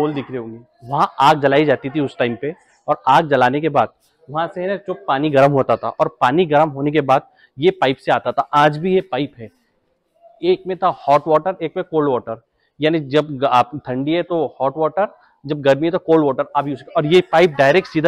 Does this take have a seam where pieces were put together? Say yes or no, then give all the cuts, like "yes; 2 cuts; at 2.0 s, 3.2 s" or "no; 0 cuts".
no; 0 cuts